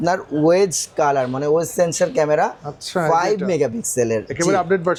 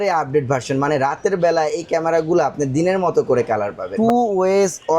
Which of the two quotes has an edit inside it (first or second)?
second